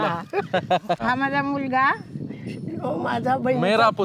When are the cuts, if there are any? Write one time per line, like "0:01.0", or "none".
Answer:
0:01.0